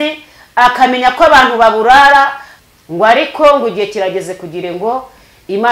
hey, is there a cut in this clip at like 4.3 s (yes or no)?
no